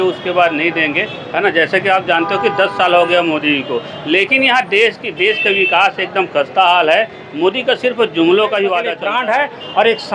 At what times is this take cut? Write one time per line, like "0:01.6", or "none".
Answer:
0:09.0